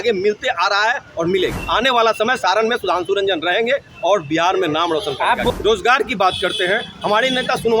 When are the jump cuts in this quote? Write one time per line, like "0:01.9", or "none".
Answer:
0:01.6
0:05.5